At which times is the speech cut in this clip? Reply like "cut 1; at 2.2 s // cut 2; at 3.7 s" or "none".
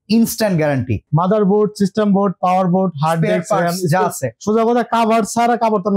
cut 1; at 1.0 s